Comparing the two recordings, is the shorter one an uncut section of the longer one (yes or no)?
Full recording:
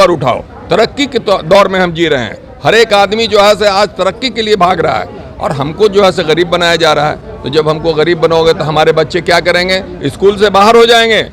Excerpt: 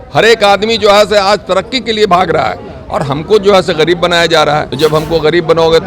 no